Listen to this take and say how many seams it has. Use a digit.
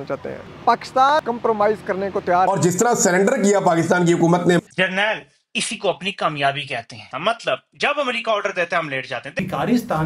4